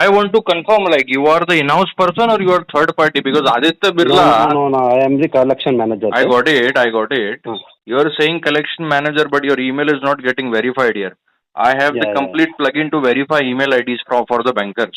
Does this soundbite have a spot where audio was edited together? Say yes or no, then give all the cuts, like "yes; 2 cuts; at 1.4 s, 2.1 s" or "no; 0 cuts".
no; 0 cuts